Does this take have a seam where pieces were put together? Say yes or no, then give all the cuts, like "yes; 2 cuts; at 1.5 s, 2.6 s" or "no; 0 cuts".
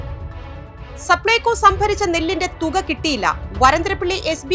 yes; 1 cut; at 1.1 s